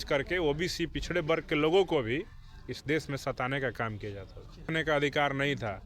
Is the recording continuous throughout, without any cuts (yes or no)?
no